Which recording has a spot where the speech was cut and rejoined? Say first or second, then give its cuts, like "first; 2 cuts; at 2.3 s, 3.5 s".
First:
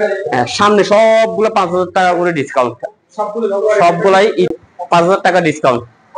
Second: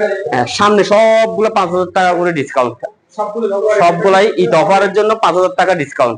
first; 1 cut; at 4.5 s